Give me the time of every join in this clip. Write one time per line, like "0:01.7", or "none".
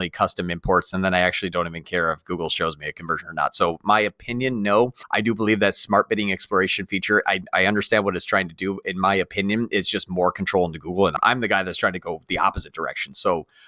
0:05.0
0:11.1